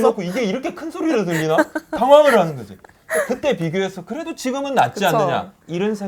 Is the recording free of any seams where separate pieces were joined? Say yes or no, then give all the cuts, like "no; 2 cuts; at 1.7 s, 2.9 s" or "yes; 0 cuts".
yes; 0 cuts